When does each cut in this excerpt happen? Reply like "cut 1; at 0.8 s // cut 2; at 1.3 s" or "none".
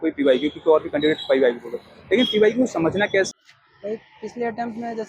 cut 1; at 3.3 s